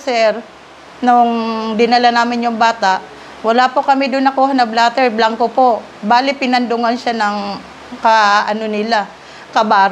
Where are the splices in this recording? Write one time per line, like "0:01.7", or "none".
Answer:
none